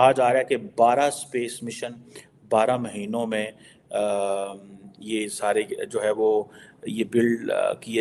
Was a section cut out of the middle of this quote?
no; 0 cuts

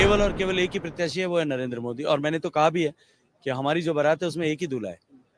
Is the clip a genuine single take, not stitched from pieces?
yes; 0 cuts

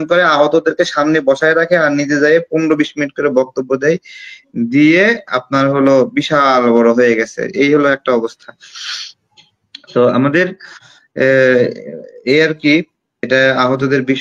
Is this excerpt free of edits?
yes; 0 cuts

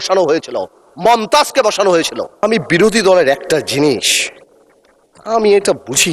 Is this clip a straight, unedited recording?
no; 1 cut; at 2.4 s

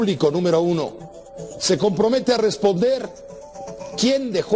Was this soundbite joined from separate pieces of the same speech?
no; 0 cuts

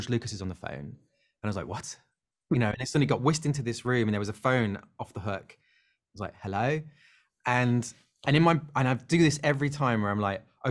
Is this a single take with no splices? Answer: yes; 0 cuts

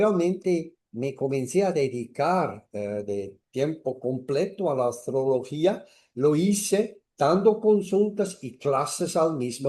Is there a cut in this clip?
no; 0 cuts

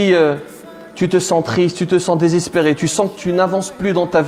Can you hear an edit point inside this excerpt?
no; 0 cuts

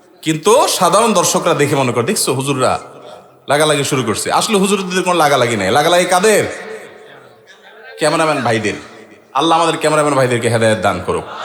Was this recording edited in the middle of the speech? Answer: no; 0 cuts

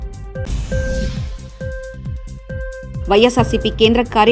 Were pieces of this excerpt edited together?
yes; 1 cut; at 2.9 s

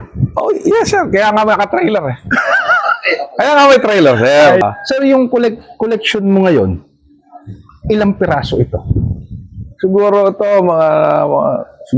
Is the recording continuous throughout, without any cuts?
no; 1 cut; at 4.6 s

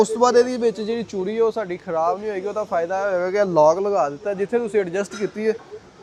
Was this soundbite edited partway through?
no; 0 cuts

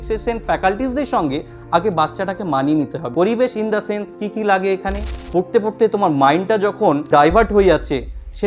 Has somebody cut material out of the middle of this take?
yes; 3 cuts; at 3.0 s, 5.2 s, 7.1 s

